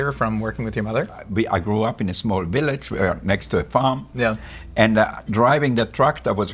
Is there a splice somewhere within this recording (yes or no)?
no